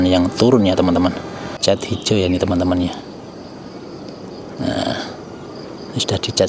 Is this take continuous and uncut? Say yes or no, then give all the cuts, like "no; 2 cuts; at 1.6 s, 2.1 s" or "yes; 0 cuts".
no; 1 cut; at 1.6 s